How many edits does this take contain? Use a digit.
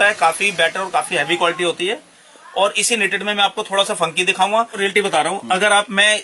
1